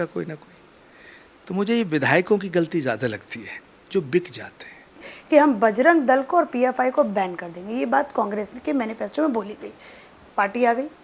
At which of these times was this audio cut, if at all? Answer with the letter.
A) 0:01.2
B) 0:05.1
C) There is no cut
B